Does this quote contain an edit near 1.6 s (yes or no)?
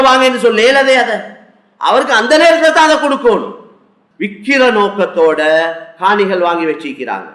no